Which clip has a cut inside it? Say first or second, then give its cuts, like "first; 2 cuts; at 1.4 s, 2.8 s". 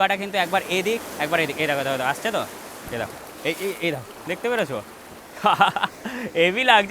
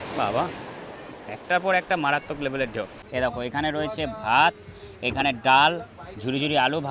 second; 1 cut; at 3.0 s